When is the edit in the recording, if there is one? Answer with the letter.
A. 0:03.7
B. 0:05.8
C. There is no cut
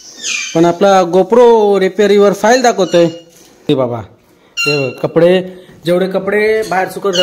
A